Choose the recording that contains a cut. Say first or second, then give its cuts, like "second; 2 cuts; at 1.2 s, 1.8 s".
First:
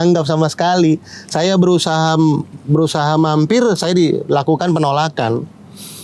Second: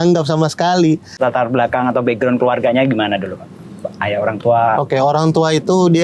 second; 1 cut; at 1.1 s